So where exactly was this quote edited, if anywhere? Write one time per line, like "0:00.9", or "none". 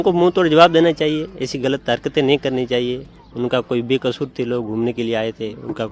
none